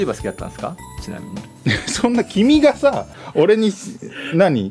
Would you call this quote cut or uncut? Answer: uncut